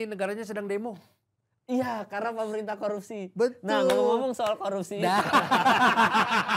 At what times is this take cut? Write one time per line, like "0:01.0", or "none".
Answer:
none